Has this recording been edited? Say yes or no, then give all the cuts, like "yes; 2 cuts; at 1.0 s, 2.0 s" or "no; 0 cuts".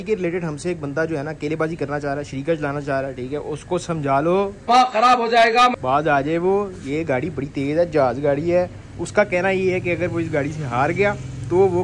no; 0 cuts